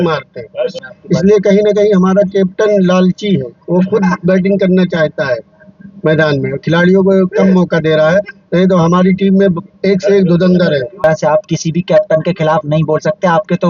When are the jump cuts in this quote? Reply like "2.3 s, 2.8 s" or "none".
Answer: 0.9 s, 11.0 s